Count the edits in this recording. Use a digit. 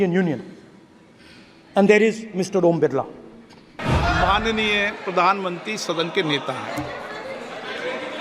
1